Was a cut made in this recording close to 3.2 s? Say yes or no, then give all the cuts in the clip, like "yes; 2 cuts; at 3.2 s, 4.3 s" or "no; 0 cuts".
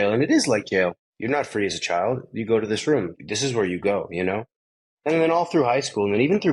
yes; 2 cuts; at 1.1 s, 3.2 s